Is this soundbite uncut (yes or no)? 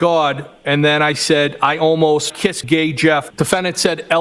yes